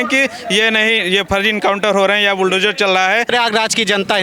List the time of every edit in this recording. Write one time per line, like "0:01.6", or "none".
0:03.3